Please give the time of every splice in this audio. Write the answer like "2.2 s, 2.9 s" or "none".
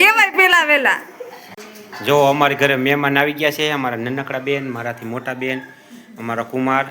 1.6 s